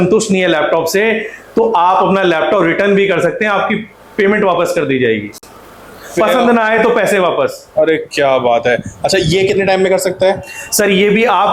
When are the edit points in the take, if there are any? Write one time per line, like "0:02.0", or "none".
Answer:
none